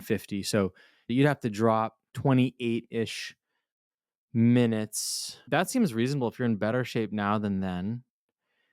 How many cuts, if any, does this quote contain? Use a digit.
1